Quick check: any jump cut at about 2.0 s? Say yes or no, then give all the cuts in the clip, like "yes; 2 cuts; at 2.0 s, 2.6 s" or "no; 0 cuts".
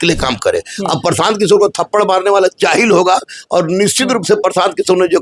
no; 0 cuts